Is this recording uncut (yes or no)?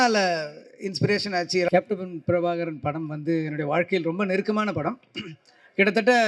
no